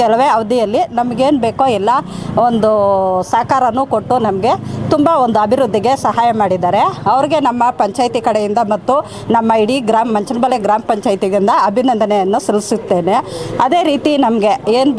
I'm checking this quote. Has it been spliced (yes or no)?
no